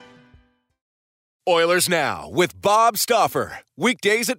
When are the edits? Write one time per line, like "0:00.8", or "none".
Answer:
0:01.2